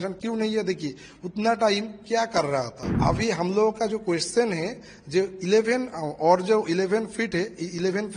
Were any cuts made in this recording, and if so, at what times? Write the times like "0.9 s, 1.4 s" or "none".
3.0 s